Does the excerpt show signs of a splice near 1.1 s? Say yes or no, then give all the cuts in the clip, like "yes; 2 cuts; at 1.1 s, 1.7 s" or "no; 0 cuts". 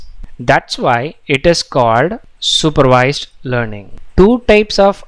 no; 1 cut; at 4.0 s